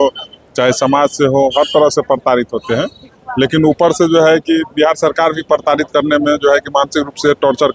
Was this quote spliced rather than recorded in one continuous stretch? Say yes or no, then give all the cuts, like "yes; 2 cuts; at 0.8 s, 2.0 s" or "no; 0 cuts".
no; 0 cuts